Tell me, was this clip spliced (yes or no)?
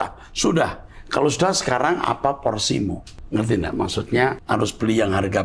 yes